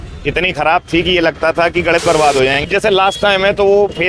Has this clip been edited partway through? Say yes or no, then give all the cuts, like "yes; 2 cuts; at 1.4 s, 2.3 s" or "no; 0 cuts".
yes; 1 cut; at 2.6 s